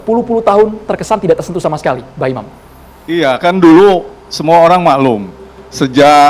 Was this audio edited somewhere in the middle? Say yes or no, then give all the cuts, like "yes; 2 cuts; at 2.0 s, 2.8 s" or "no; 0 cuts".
no; 0 cuts